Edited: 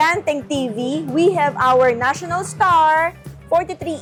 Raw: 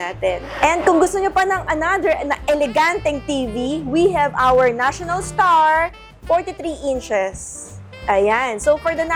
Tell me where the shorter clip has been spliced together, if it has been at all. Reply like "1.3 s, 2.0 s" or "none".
none